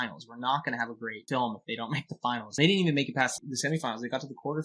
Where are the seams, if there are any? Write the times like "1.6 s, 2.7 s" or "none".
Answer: 1.1 s, 2.5 s, 3.4 s